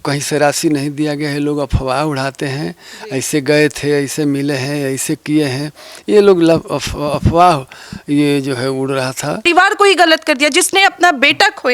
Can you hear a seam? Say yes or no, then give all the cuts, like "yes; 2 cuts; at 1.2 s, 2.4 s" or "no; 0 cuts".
yes; 1 cut; at 9.4 s